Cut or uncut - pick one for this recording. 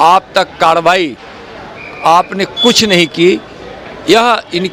uncut